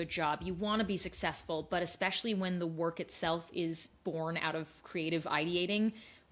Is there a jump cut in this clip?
no; 0 cuts

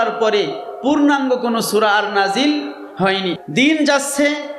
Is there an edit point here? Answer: yes; 1 cut; at 3.4 s

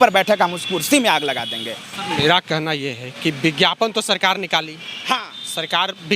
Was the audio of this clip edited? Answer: no; 0 cuts

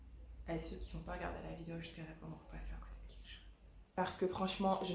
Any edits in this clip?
yes; 1 cut; at 3.9 s

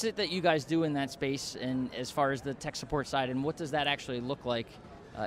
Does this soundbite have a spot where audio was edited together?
no; 0 cuts

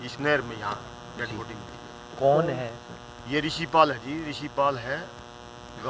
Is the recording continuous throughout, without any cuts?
yes; 0 cuts

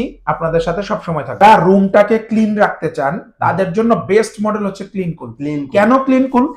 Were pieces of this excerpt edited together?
yes; 1 cut; at 1.4 s

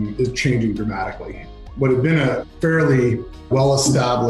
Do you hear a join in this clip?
yes; 3 cuts; at 1.6 s, 2.5 s, 3.5 s

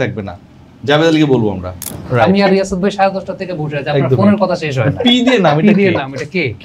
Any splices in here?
yes; 1 cut; at 1.9 s

